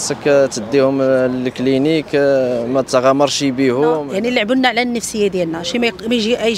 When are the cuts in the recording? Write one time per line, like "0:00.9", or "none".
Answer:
0:04.0